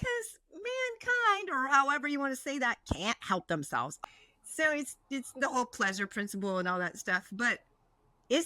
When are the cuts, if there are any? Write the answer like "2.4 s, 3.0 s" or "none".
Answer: 4.0 s